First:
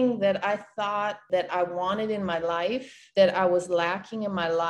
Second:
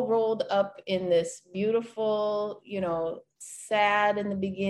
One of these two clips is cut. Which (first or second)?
first